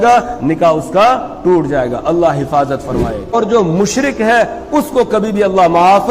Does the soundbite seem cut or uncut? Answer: cut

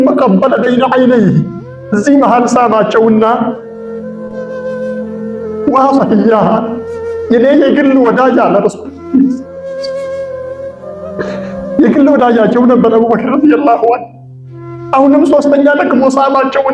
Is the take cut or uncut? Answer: cut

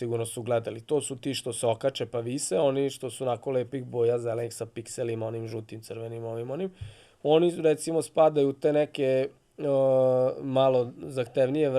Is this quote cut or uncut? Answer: uncut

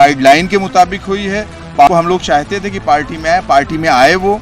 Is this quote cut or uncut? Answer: cut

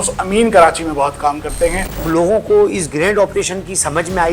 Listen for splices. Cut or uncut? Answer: cut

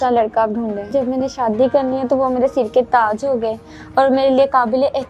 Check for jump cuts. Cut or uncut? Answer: cut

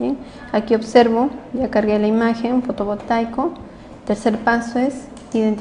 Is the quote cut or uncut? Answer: uncut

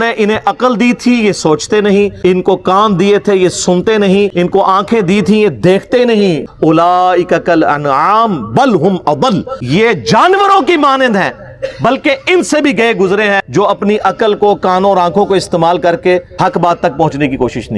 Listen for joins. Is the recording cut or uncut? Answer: cut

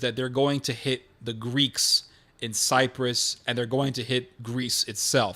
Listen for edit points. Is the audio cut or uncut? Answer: cut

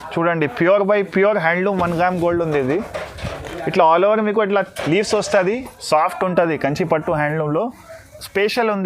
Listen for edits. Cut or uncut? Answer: cut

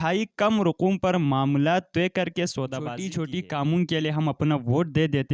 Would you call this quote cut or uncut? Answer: cut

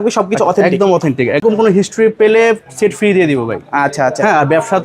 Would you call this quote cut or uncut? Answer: cut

